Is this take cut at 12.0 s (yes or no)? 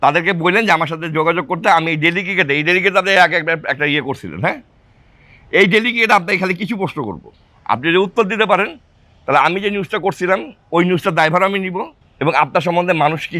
yes